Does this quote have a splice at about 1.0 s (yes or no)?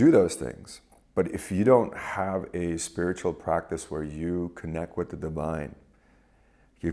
no